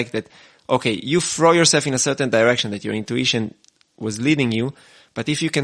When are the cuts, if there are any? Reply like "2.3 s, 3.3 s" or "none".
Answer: none